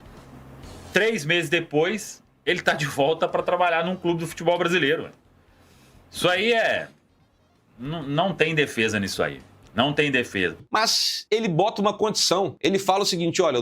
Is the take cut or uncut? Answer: cut